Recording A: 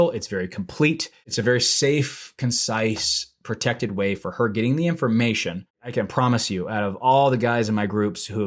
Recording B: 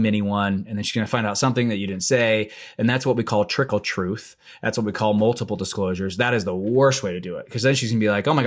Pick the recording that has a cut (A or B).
A